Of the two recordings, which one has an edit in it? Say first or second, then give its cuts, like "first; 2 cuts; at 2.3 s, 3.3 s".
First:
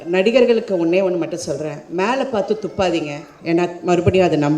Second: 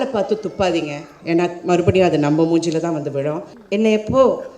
second; 1 cut; at 3.5 s